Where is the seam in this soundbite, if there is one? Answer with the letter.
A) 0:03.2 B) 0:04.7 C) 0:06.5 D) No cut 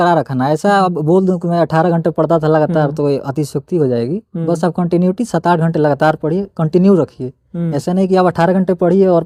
D